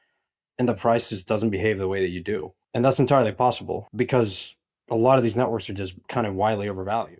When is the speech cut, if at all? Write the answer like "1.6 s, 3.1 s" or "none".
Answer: 2.6 s, 3.8 s, 5.9 s